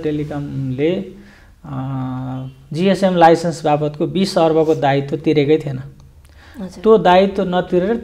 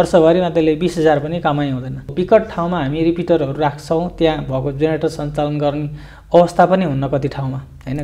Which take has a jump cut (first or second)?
second